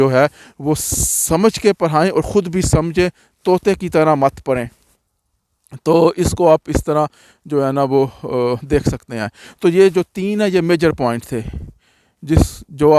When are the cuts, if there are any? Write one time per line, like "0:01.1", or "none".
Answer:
none